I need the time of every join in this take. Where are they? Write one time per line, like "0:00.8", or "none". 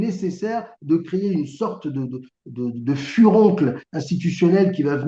none

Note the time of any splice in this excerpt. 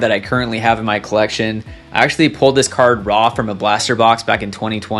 none

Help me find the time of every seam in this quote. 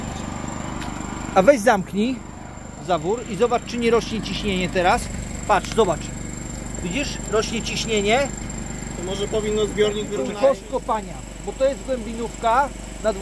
0:10.2

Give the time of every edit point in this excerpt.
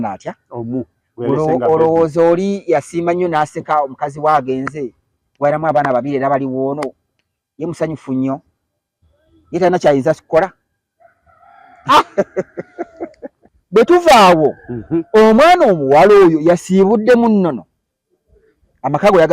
0:13.5

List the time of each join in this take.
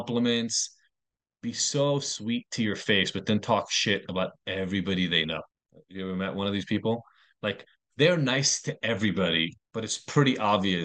0:09.6

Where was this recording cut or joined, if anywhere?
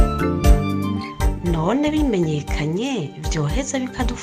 0:01.3

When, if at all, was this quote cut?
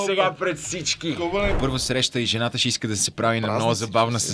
0:01.5

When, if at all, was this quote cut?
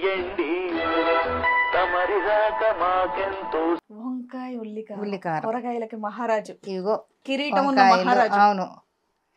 0:03.9

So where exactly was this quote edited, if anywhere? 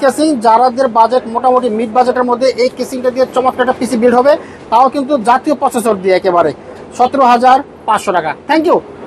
none

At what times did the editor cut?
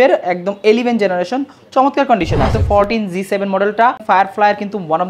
0:02.5
0:04.0

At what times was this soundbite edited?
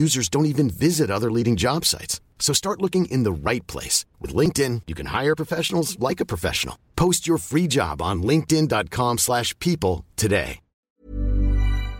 0:10.9

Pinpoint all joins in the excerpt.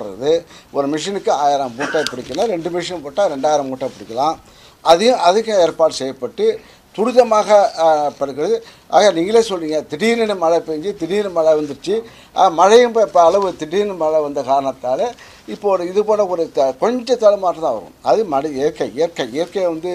none

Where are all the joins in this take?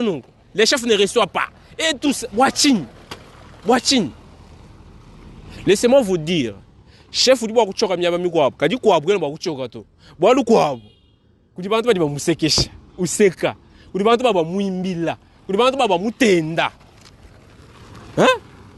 none

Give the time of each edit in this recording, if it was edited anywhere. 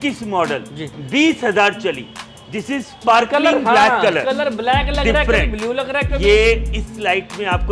none

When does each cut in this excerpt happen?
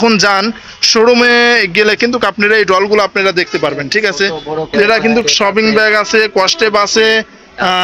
0:04.8

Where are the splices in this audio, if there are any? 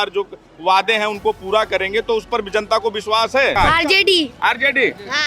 0:03.5

